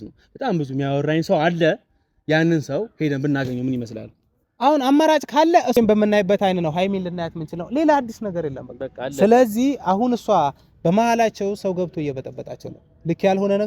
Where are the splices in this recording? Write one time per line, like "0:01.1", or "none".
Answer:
0:05.7